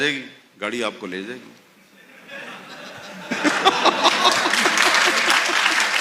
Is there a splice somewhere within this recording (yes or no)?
no